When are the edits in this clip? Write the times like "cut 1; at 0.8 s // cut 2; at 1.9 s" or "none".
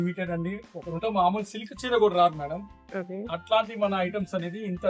cut 1; at 1.0 s